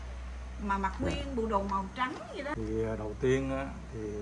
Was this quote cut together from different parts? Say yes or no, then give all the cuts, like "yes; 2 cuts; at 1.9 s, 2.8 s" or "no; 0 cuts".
yes; 1 cut; at 2.5 s